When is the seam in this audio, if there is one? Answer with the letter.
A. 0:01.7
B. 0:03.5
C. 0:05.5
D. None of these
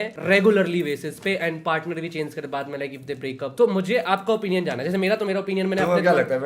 B